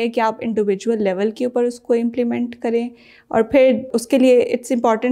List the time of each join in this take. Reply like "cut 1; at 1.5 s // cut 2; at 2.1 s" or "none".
cut 1; at 3.9 s